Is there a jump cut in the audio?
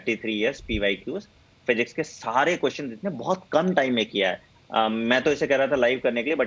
no; 0 cuts

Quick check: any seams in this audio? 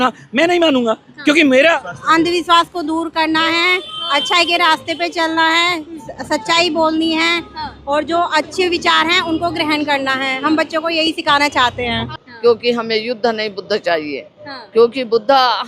yes; 2 cuts; at 1.9 s, 12.1 s

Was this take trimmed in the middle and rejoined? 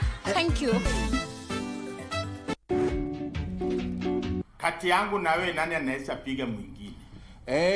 yes; 1 cut; at 2.6 s

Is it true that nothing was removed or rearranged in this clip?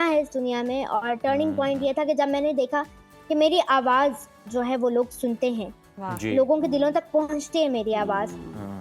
yes; 0 cuts

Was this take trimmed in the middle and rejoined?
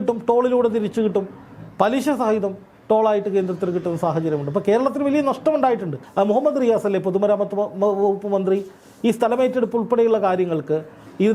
yes; 1 cut; at 6.0 s

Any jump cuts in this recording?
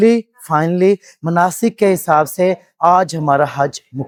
no; 0 cuts

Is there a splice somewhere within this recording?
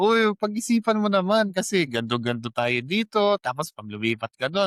no; 0 cuts

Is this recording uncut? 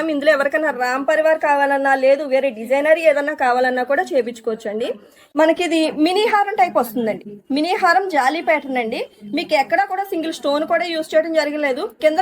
no; 1 cut; at 5.1 s

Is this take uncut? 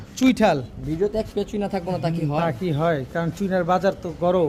yes; 0 cuts

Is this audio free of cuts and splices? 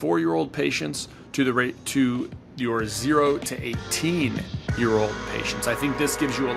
yes; 0 cuts

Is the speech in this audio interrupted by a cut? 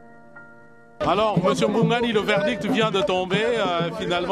yes; 1 cut; at 1.0 s

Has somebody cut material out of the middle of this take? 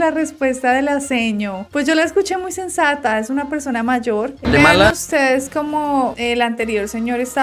yes; 1 cut; at 4.5 s

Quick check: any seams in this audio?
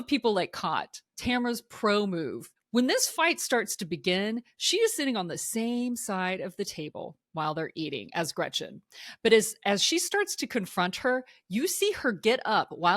yes; 2 cuts; at 1.1 s, 2.5 s

